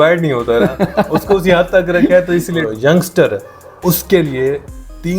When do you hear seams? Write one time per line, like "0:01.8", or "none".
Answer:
0:02.6